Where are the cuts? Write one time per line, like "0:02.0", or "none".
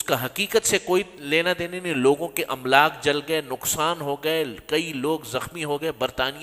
none